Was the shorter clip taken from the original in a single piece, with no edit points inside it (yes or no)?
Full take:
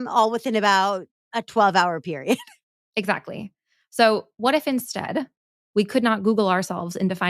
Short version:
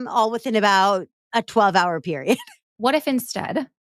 no